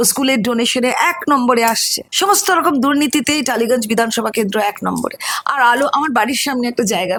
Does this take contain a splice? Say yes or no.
no